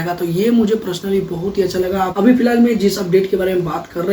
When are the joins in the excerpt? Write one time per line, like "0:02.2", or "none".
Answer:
0:02.1